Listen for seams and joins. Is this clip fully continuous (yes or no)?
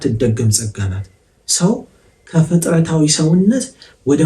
yes